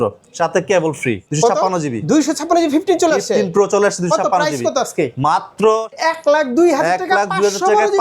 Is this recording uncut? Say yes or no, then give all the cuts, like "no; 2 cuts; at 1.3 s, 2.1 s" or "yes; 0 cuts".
no; 2 cuts; at 1.2 s, 5.9 s